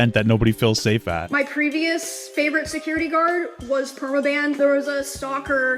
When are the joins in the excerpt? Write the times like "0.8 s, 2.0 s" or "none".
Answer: 1.3 s, 4.6 s